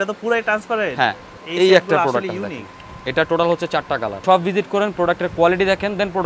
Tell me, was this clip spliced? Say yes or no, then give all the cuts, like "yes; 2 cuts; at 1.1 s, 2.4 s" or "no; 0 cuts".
yes; 2 cuts; at 1.3 s, 4.2 s